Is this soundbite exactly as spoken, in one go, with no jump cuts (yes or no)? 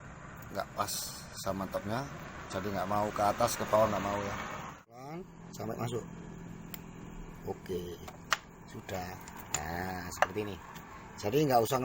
no